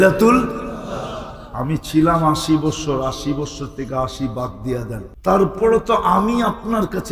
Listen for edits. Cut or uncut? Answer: cut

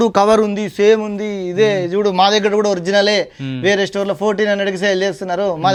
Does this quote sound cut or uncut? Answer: uncut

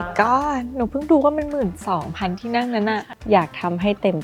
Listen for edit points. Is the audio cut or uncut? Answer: cut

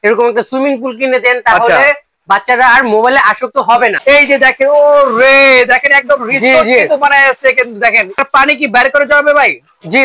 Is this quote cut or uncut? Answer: cut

